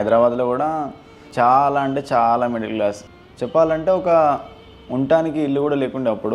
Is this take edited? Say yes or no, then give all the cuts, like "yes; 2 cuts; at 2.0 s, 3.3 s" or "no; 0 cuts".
yes; 2 cuts; at 1.2 s, 3.1 s